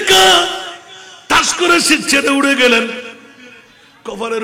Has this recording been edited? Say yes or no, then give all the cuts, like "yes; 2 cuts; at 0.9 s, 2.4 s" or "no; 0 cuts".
no; 0 cuts